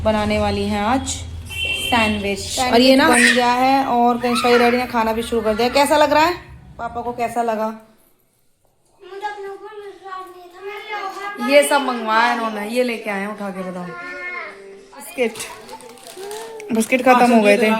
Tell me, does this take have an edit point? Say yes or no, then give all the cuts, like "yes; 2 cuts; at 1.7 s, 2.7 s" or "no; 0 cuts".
yes; 4 cuts; at 3.1 s, 7.1 s, 10.9 s, 15.1 s